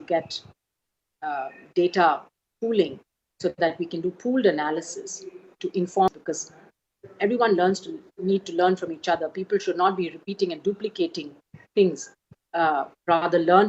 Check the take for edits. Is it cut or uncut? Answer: cut